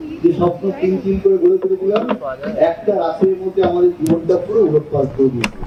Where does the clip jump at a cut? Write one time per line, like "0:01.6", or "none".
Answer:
none